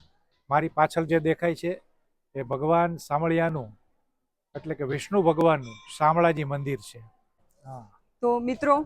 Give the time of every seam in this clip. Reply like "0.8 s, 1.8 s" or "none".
7.7 s